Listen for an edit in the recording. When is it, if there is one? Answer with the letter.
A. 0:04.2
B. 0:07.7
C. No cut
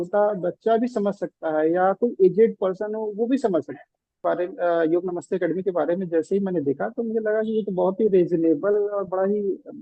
A